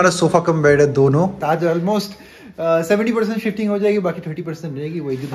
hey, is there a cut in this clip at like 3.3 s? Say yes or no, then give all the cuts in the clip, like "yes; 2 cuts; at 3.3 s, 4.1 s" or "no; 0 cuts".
no; 1 cut; at 1.4 s